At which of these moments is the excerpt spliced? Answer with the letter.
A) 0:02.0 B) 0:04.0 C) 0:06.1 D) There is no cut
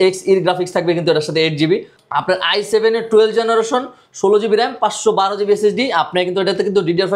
A